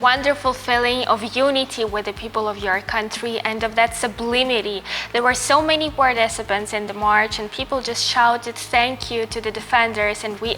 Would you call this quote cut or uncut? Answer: uncut